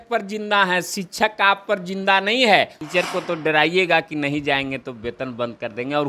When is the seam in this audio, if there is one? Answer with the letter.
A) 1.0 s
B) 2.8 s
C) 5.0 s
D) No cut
B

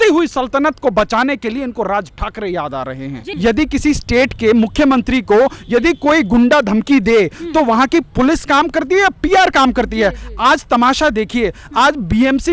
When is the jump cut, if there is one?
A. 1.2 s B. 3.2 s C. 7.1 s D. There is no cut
B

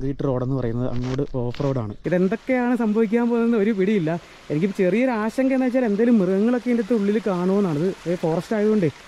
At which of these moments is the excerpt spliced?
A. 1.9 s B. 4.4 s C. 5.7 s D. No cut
A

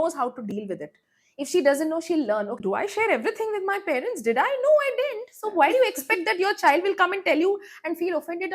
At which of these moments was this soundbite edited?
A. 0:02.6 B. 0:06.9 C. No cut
A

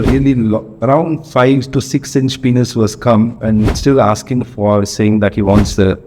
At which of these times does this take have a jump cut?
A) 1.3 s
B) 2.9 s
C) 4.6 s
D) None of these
D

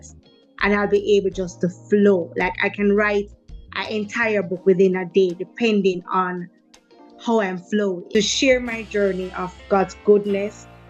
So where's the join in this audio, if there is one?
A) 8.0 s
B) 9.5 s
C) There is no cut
A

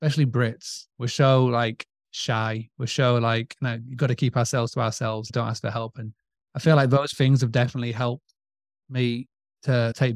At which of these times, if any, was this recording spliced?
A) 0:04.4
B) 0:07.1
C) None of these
B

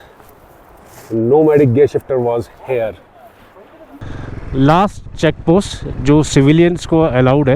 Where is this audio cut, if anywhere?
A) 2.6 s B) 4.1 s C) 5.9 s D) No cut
B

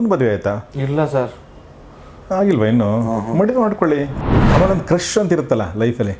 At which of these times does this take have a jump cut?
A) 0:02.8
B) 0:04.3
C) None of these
B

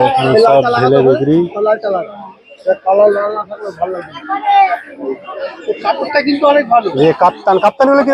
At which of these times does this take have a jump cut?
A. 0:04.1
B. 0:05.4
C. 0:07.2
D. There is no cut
D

